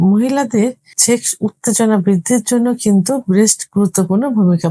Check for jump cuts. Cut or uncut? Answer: cut